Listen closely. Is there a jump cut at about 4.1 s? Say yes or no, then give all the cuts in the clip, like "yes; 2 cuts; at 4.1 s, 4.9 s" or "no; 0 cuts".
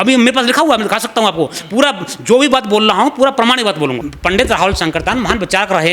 yes; 1 cut; at 4.1 s